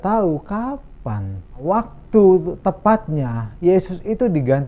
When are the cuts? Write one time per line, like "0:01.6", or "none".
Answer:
0:01.6